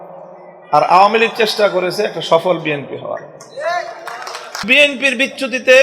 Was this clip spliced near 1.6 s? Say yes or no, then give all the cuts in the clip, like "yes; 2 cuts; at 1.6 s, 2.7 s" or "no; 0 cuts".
no; 1 cut; at 4.6 s